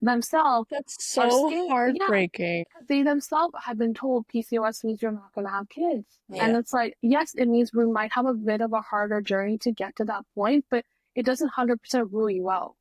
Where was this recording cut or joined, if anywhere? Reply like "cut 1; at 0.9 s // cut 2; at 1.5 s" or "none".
cut 1; at 2.7 s